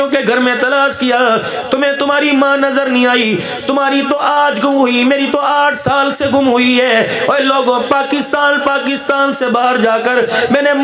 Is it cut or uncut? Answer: uncut